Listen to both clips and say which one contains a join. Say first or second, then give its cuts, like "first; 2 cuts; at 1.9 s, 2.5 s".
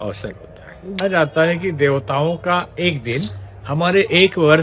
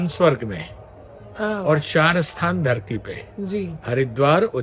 first; 1 cut; at 1.0 s